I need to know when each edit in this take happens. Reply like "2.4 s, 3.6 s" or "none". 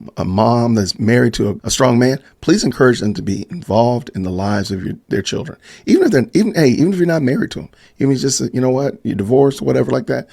1.6 s, 4.9 s